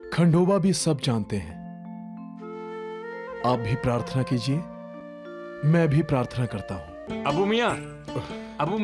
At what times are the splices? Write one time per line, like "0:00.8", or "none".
0:07.0